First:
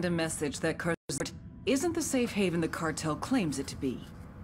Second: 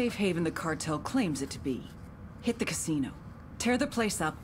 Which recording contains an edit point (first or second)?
first